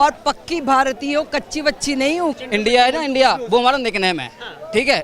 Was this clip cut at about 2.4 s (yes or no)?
yes